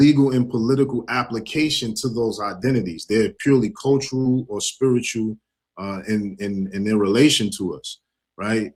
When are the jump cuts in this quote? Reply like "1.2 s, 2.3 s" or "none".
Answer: none